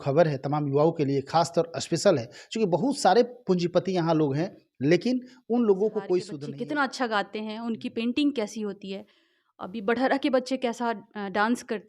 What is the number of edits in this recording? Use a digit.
1